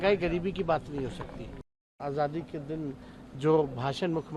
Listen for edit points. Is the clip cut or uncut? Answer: cut